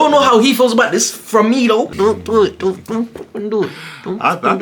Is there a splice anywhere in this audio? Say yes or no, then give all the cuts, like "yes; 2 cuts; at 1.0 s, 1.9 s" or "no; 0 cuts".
yes; 1 cut; at 1.9 s